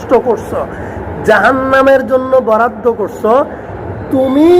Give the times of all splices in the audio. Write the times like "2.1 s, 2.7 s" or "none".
3.6 s